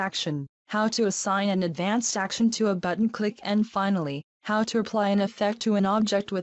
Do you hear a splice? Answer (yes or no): yes